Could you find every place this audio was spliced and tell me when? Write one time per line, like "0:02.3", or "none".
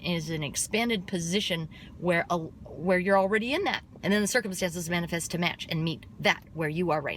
0:03.9